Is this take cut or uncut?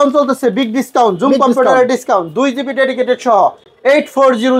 uncut